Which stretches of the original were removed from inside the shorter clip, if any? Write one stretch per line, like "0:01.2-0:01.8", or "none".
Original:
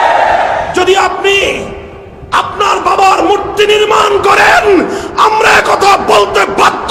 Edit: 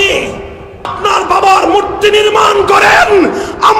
0:02.3-0:02.5